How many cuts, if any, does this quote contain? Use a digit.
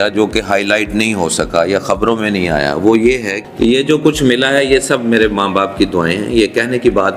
1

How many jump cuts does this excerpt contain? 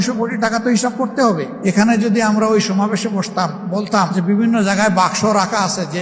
1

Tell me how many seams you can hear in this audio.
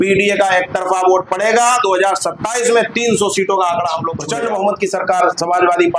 1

